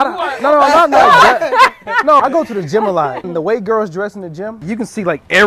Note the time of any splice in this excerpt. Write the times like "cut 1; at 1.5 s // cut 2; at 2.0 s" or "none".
cut 1; at 2.2 s // cut 2; at 3.3 s // cut 3; at 4.6 s